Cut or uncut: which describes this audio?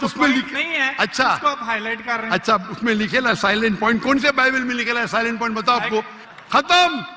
cut